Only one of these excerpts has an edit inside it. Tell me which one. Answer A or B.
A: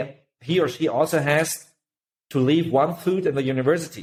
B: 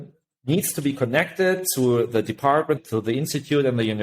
B